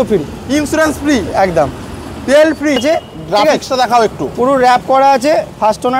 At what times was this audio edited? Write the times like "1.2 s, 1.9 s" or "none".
2.8 s